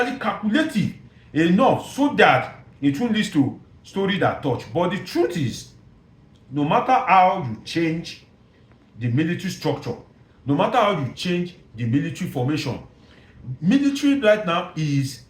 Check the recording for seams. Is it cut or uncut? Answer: uncut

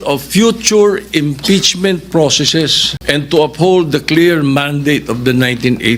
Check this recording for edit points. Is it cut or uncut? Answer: cut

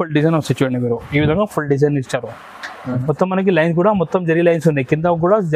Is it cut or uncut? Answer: cut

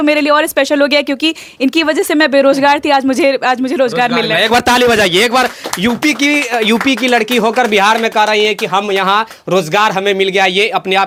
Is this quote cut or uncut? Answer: uncut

